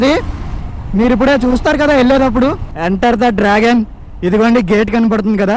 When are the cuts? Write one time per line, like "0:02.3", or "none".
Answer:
0:02.8